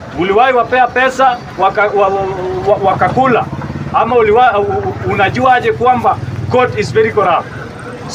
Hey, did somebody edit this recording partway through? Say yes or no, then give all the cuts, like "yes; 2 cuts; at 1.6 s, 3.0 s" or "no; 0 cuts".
no; 0 cuts